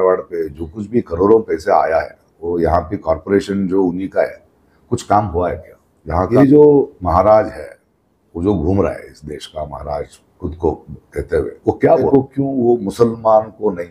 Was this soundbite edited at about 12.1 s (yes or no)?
yes